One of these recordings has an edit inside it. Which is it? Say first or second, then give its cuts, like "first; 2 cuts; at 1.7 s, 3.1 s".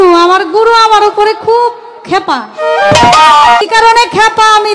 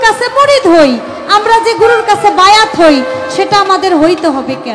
first; 1 cut; at 3.6 s